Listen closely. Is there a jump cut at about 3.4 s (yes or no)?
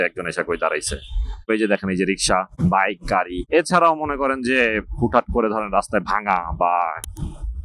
yes